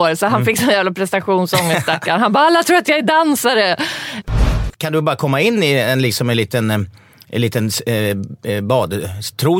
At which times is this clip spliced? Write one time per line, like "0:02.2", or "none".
0:04.3